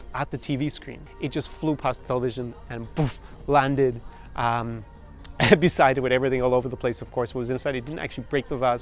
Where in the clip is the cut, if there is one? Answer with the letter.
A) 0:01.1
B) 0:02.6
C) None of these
A